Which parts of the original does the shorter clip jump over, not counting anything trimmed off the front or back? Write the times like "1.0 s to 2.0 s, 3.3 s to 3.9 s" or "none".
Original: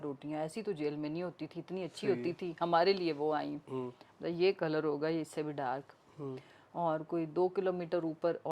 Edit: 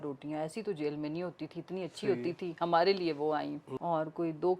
3.6 s to 6.6 s